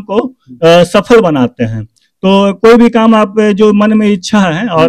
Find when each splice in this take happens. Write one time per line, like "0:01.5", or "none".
none

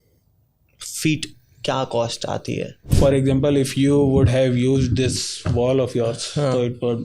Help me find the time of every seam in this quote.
0:02.9

